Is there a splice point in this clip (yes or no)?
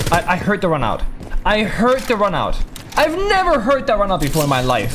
no